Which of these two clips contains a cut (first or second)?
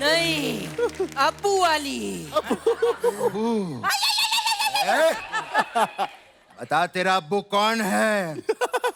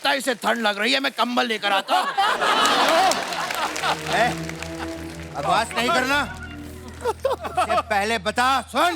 second